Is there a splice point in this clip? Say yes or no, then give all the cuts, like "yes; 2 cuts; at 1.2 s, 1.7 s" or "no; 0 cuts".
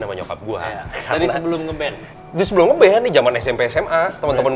no; 0 cuts